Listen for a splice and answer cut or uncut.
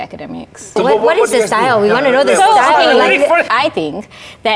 cut